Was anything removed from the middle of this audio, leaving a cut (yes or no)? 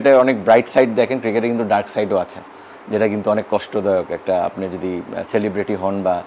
no